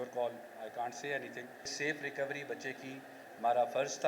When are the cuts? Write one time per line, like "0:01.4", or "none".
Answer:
0:01.7

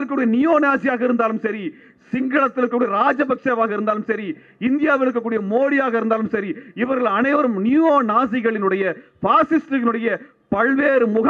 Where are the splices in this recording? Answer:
none

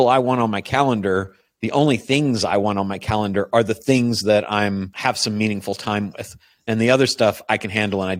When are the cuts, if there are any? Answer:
0:04.9

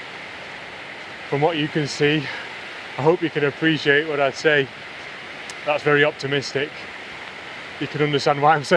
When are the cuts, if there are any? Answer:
none

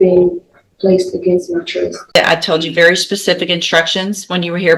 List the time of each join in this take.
0:02.2

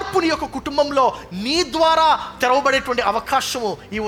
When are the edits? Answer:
none

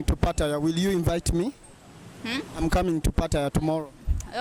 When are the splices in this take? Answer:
none

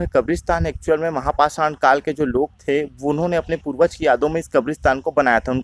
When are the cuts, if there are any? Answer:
none

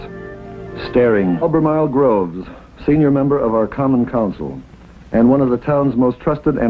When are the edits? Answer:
none

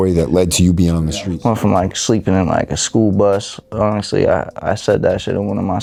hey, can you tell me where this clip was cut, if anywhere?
none

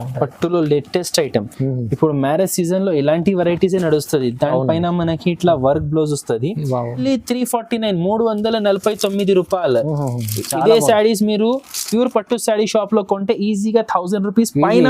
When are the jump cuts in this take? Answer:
0:07.0

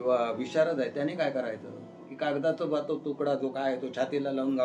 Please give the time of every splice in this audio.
0:02.1

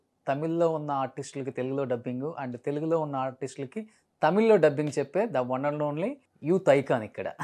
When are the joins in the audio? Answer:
0:06.3

